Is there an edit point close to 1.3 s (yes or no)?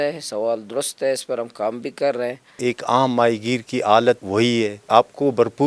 no